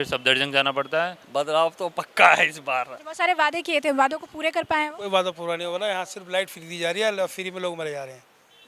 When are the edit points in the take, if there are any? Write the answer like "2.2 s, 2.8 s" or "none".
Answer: 1.2 s, 3.0 s